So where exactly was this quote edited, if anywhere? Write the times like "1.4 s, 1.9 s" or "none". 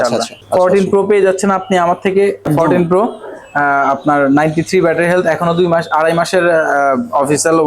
0.8 s, 2.5 s